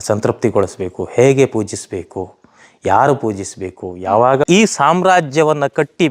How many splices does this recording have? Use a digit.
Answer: 1